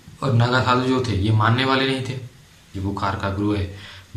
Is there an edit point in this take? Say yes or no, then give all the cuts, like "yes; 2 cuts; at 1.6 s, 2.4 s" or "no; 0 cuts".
yes; 1 cut; at 2.7 s